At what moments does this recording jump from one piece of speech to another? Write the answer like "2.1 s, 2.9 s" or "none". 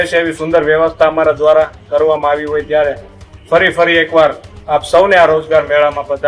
none